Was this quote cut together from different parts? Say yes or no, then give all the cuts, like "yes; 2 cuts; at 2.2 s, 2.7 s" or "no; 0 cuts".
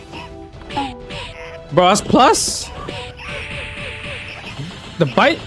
yes; 1 cut; at 2.6 s